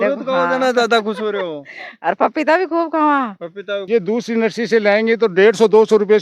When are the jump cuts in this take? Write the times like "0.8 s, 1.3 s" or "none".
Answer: 3.8 s